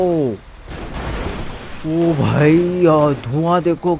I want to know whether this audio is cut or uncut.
uncut